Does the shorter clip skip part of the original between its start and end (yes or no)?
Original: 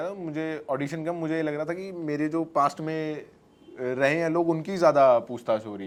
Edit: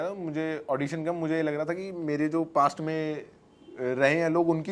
no